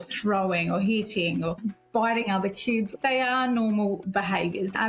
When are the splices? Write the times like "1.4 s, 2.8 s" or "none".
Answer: 1.6 s, 2.9 s

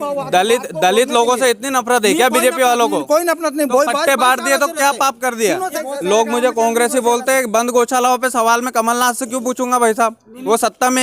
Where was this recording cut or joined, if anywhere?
5.8 s

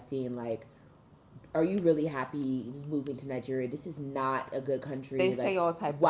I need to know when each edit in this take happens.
none

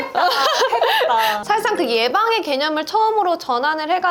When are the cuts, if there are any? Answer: 1.4 s

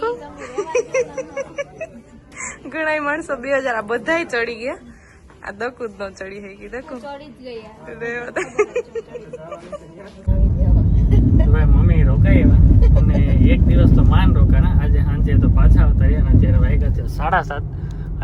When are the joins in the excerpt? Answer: none

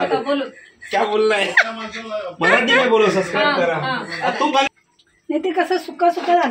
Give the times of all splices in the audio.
4.7 s

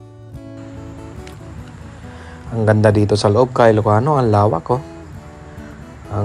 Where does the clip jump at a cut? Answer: 2.4 s

